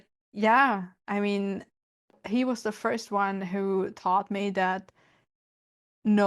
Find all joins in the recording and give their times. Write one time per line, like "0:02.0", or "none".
0:02.2

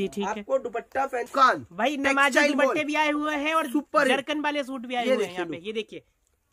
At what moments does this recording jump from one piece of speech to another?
0:01.3

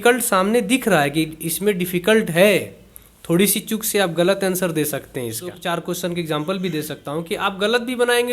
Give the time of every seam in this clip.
0:05.5

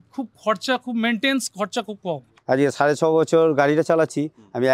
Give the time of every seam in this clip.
0:02.3

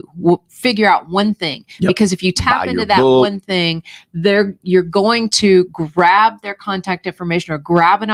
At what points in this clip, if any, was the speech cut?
none

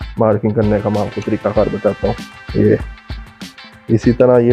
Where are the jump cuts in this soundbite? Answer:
0:02.3

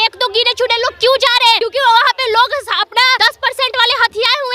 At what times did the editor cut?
0:01.6
0:03.2

